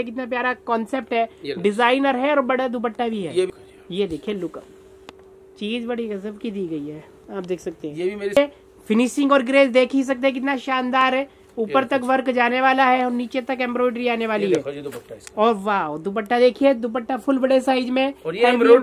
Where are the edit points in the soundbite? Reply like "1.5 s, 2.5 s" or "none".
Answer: 3.5 s, 8.4 s

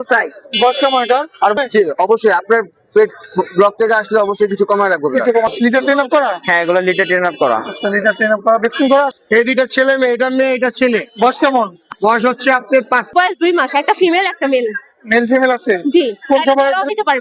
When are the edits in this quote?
1.5 s, 5.5 s, 9.2 s, 13.1 s

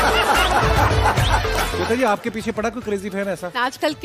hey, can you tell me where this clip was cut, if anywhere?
none

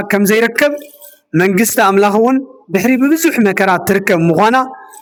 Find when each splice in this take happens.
none

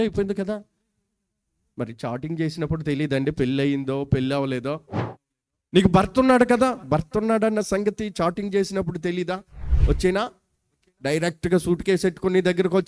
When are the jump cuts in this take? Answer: none

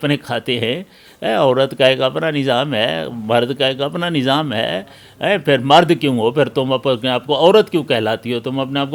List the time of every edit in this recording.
none

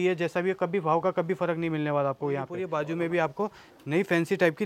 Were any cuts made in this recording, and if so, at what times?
2.6 s

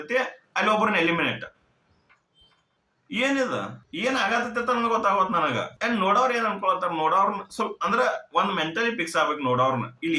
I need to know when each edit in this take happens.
none

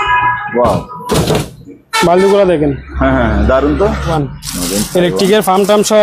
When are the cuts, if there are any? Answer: 4.2 s

